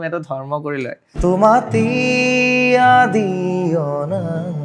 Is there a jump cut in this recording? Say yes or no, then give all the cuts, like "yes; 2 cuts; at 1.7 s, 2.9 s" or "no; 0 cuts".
yes; 1 cut; at 1.1 s